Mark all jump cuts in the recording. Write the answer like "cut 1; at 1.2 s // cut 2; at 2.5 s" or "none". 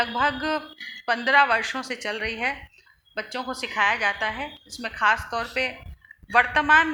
none